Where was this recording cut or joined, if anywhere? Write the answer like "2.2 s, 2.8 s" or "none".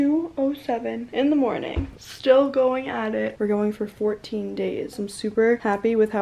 3.3 s, 4.9 s